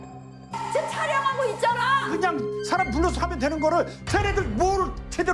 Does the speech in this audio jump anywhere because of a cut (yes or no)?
yes